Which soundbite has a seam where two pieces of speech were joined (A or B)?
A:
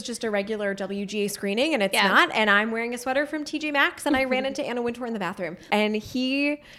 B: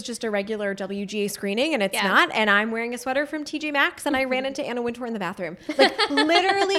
A